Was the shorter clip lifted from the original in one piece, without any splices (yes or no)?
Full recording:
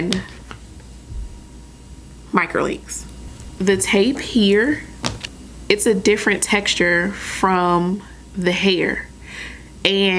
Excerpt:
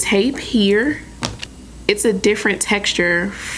yes